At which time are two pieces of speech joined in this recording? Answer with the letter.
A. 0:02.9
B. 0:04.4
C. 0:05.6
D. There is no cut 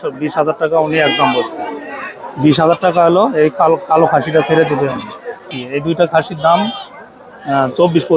C